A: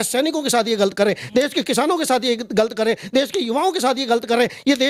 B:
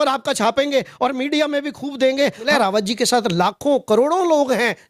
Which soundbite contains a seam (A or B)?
B